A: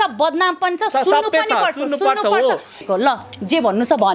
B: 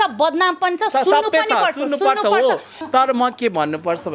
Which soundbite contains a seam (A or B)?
A